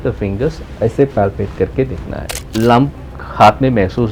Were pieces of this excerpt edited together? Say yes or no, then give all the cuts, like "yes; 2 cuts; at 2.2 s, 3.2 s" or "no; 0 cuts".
yes; 1 cut; at 2.4 s